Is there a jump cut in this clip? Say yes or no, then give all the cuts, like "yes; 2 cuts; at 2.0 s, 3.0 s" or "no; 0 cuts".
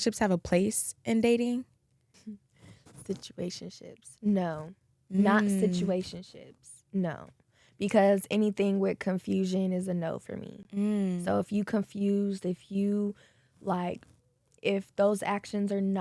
no; 0 cuts